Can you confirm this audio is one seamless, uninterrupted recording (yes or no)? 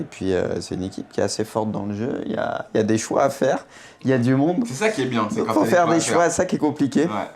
no